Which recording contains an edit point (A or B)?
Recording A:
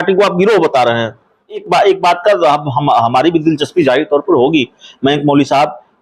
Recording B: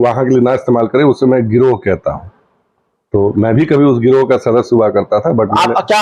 A